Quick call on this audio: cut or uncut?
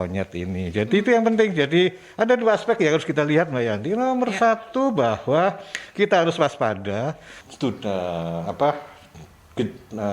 cut